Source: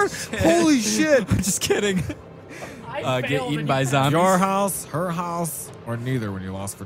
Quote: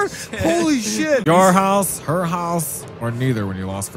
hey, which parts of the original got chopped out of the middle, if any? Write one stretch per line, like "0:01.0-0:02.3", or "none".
0:01.2-0:04.1